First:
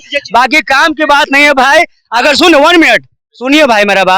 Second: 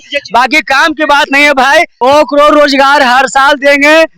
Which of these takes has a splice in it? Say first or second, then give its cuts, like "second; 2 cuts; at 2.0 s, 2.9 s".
second; 1 cut; at 2.0 s